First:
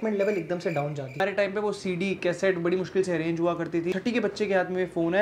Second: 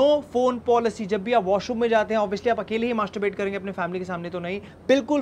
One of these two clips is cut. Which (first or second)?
first